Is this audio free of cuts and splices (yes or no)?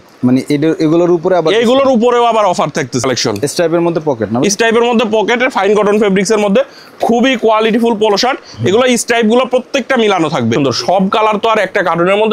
no